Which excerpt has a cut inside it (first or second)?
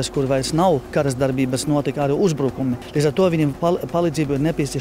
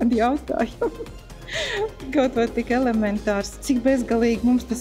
first